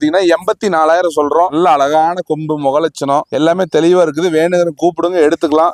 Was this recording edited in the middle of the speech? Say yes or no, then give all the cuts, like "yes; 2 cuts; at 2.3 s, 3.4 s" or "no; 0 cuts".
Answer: no; 0 cuts